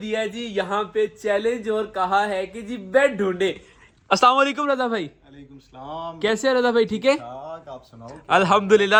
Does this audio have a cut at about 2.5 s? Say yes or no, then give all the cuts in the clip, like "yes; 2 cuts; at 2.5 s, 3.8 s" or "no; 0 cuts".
no; 0 cuts